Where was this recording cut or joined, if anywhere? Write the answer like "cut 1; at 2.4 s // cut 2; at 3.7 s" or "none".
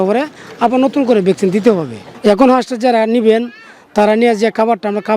cut 1; at 2.0 s